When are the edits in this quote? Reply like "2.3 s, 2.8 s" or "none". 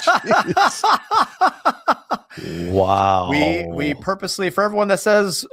none